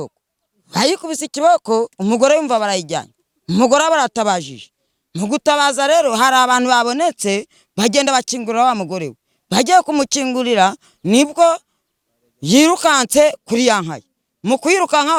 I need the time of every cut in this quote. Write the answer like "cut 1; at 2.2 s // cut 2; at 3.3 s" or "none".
none